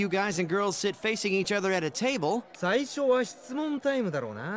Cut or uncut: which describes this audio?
cut